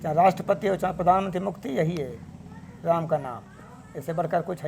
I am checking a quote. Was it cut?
no; 0 cuts

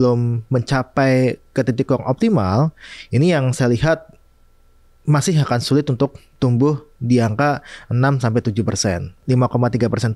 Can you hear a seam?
yes; 1 cut; at 9.2 s

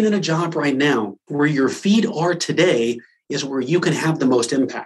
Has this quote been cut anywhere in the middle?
yes; 1 cut; at 1.2 s

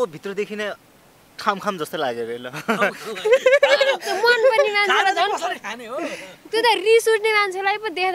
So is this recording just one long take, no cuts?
yes; 0 cuts

